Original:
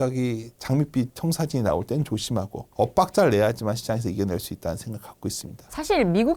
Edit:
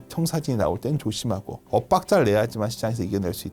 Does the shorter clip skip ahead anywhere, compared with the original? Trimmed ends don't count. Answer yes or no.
no